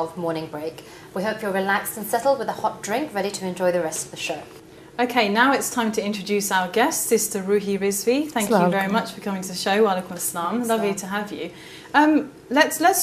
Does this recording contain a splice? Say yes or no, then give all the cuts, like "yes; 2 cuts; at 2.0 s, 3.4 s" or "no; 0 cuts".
no; 0 cuts